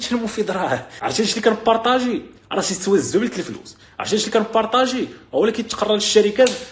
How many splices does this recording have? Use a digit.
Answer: 1